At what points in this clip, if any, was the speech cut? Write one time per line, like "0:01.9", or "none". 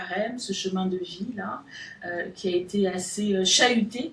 none